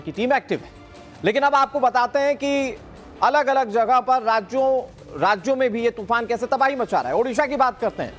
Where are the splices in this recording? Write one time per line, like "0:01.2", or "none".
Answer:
0:04.5

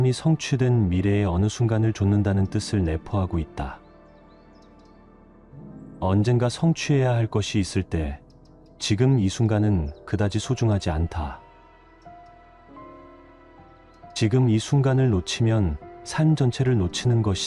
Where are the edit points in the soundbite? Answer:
none

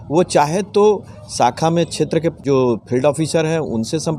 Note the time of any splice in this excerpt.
0:02.4

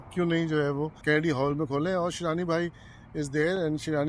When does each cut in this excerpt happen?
0:01.0

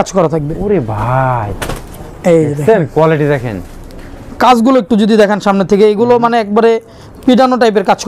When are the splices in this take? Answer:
none

